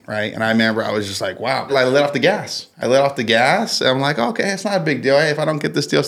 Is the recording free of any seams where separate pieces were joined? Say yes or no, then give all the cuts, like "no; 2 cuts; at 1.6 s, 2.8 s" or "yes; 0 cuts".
no; 1 cut; at 1.7 s